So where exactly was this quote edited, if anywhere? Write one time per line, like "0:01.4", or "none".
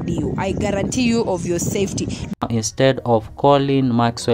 0:02.4